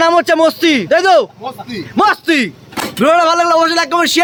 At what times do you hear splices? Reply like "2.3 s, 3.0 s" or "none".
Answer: none